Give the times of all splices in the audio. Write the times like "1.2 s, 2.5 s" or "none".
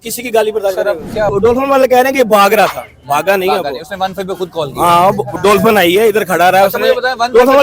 1.3 s